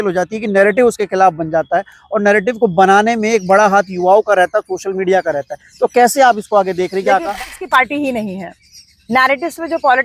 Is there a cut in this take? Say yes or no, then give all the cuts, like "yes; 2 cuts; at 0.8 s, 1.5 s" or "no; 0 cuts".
no; 0 cuts